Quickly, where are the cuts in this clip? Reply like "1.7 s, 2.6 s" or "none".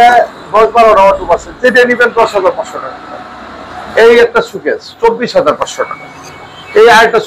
none

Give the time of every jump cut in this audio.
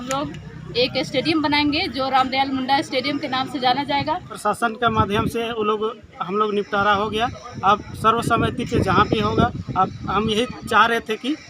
4.3 s

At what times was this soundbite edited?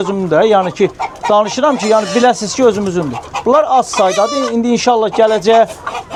none

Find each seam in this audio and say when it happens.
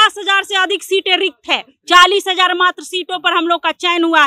none

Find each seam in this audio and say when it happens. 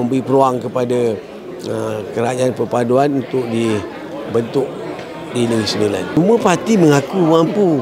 6.2 s

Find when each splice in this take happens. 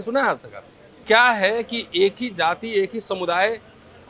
1.0 s

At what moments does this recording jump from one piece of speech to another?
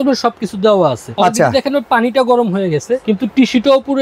1.0 s, 3.0 s

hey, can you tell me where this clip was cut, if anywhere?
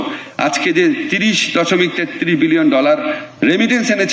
none

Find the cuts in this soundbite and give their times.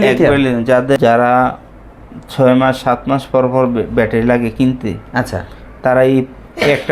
1.0 s

